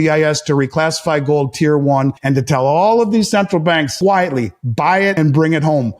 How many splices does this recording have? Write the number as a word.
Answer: three